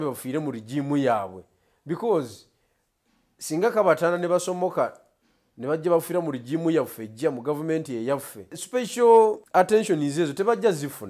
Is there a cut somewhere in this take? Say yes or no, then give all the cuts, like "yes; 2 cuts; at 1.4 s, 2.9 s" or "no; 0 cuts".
yes; 2 cuts; at 8.6 s, 9.4 s